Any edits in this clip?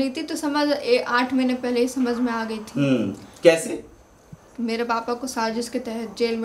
no; 0 cuts

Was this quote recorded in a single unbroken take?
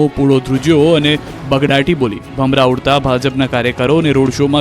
no; 1 cut; at 2.2 s

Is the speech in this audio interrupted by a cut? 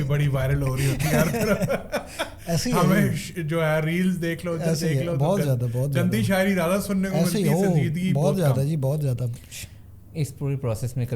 no; 0 cuts

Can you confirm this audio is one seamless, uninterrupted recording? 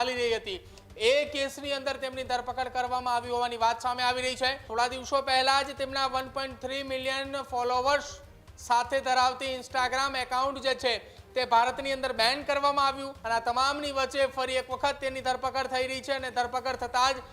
no; 2 cuts; at 4.6 s, 13.1 s

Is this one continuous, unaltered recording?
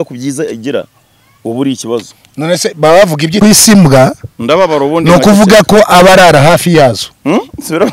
no; 1 cut; at 3.4 s

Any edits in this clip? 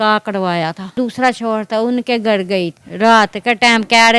yes; 2 cuts; at 1.0 s, 2.8 s

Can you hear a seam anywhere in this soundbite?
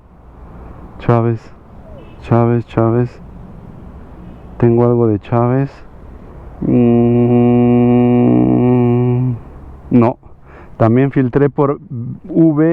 no; 0 cuts

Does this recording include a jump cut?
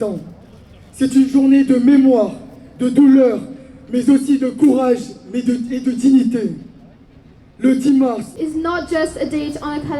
yes; 1 cut; at 8.3 s

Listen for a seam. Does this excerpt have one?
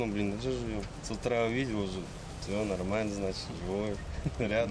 yes; 1 cut; at 0.9 s

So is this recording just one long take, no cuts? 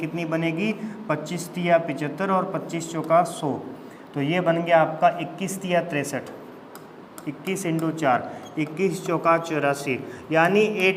yes; 0 cuts

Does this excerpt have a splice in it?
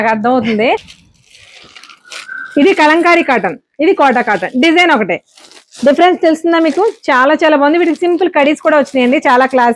yes; 1 cut; at 1.0 s

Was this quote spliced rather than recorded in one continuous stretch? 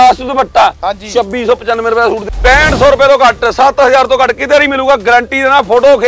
yes; 1 cut; at 2.3 s

